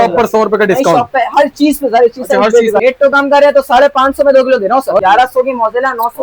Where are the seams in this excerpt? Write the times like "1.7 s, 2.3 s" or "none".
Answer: 2.8 s, 5.0 s